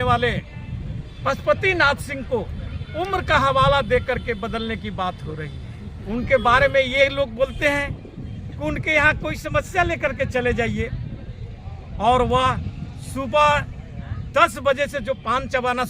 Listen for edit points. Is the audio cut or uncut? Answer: cut